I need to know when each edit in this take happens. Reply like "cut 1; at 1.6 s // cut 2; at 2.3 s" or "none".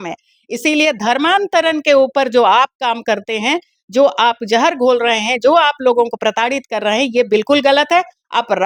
none